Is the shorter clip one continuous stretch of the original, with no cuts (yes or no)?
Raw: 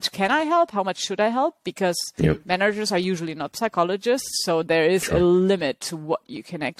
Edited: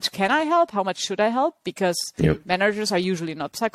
yes